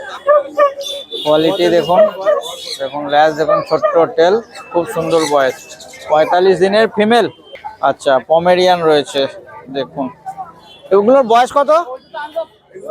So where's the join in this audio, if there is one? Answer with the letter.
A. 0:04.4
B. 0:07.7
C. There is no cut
B